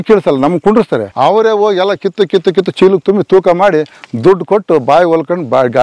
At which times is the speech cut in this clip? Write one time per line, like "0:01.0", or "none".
0:01.1